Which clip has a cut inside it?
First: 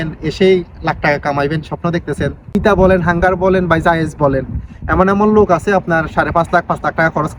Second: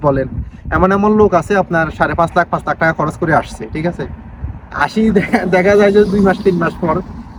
first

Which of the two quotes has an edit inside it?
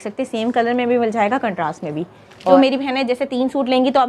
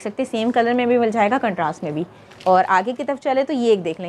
first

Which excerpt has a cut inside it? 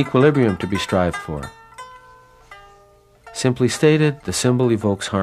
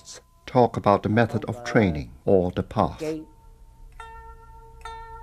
second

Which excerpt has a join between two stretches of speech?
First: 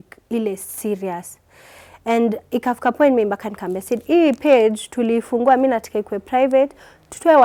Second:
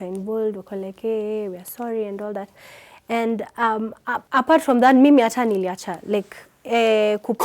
second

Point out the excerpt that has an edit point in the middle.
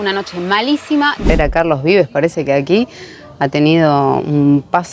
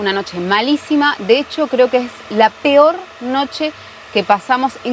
first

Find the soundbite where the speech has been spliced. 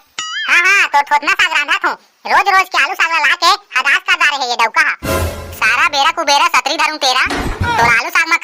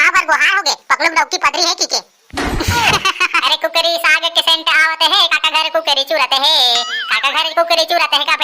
second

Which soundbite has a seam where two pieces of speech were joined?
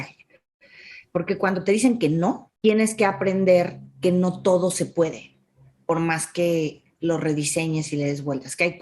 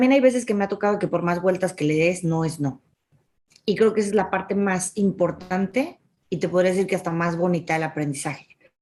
first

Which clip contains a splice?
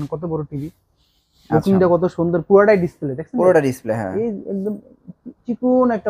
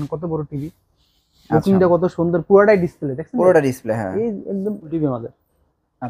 second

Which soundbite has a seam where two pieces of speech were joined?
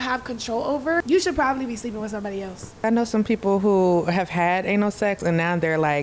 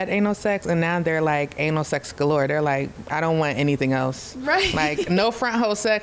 first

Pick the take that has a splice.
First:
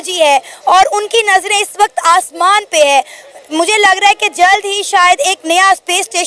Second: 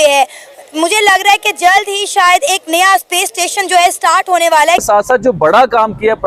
second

